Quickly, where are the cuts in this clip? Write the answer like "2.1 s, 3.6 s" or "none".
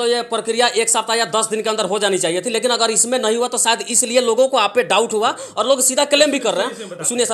none